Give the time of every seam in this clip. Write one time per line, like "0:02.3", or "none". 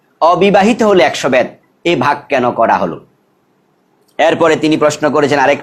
none

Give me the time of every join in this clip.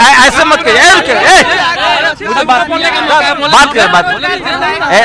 none

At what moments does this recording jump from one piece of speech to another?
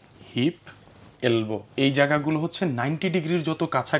0:01.7

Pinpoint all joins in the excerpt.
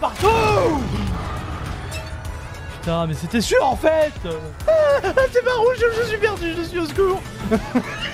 0:04.6

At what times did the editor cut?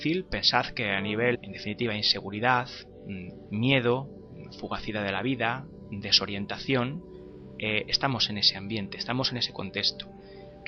none

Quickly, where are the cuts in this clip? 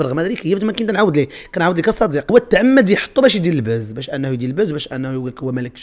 0:02.3

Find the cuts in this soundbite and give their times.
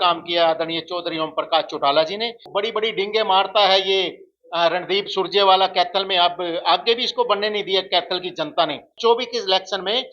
0:02.4
0:08.9

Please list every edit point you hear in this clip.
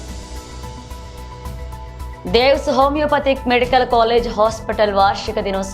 0:01.6

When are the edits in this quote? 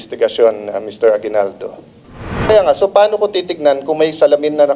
0:02.5

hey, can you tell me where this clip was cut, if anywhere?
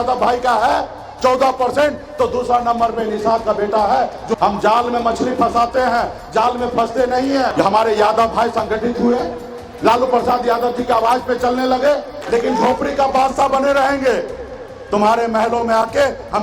0:04.4
0:07.5
0:12.1

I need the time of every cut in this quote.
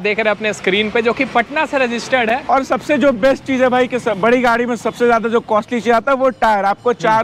none

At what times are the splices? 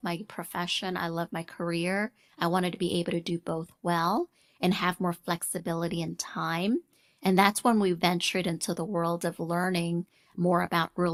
none

